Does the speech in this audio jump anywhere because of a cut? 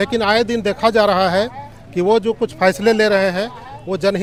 no; 0 cuts

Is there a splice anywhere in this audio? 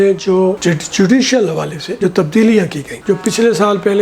no; 0 cuts

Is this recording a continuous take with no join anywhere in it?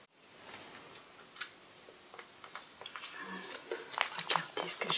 yes; 0 cuts

